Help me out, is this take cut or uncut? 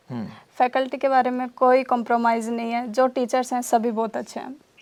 uncut